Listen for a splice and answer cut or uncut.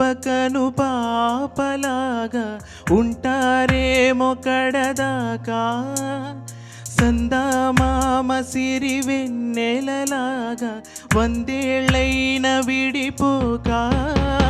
uncut